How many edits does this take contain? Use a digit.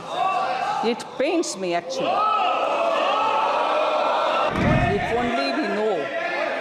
1